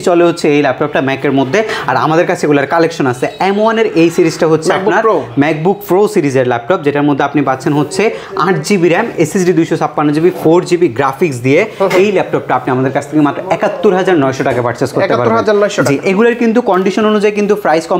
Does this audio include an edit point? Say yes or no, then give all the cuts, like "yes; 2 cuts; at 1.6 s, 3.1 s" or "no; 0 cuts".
no; 0 cuts